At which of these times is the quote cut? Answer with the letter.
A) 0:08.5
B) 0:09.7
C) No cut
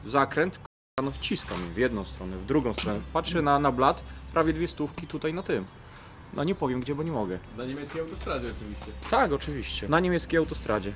B